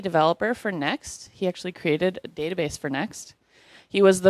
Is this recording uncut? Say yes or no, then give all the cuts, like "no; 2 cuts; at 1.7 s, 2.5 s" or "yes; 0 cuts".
no; 1 cut; at 1.7 s